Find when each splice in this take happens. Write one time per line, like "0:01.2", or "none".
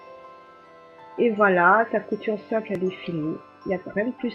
0:01.5

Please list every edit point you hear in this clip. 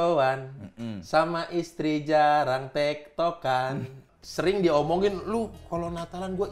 0:04.1

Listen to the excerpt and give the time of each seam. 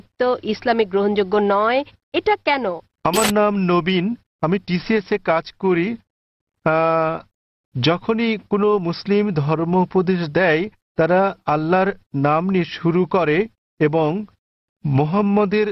0:02.9

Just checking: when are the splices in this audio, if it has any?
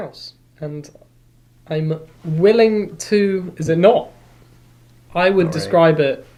none

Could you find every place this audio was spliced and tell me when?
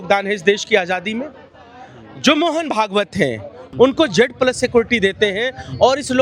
0:03.6

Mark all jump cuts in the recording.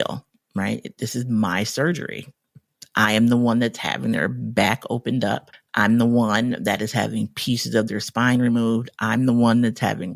0:05.6

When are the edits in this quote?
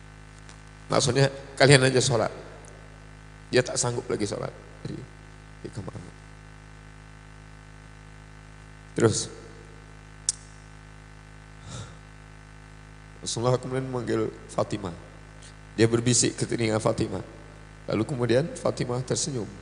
none

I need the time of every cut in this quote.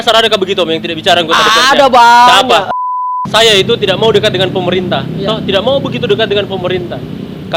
0:02.7

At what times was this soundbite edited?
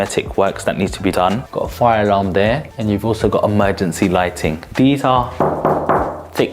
0:01.1
0:02.7
0:04.6

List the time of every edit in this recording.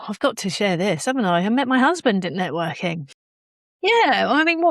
0:03.6

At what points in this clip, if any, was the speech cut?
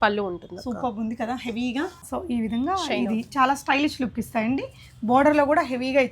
0:02.0

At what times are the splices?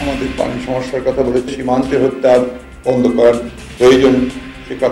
0:01.5

